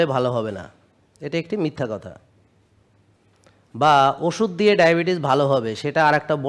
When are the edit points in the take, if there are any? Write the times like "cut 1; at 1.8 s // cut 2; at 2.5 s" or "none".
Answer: none